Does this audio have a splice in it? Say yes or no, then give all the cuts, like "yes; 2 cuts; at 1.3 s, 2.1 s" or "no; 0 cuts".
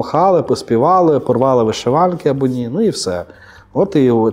no; 0 cuts